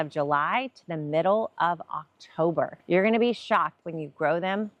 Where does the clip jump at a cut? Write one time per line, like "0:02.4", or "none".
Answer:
0:02.8
0:03.8